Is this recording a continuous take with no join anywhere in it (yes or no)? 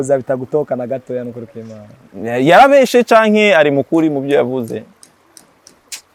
yes